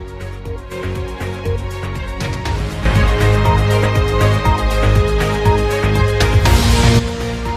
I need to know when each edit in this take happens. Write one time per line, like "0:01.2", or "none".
none